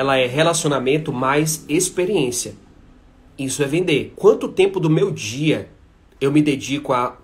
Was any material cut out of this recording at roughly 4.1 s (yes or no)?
yes